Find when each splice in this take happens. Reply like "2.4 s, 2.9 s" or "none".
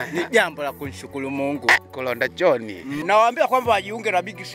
3.0 s